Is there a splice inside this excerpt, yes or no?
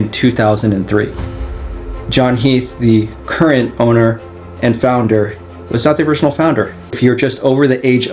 yes